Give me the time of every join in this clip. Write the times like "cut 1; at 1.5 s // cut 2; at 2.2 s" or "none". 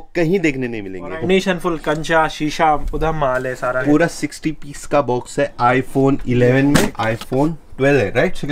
cut 1; at 1.2 s // cut 2; at 3.8 s // cut 3; at 7.0 s